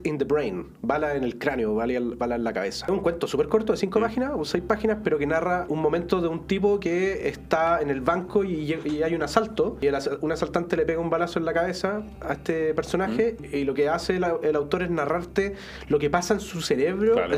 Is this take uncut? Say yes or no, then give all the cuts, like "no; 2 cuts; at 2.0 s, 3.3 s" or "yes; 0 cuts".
no; 4 cuts; at 2.9 s, 5.7 s, 9.8 s, 13.4 s